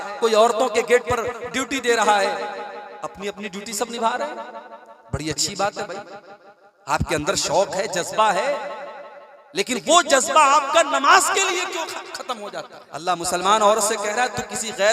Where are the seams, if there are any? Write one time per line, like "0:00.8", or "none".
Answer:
0:12.8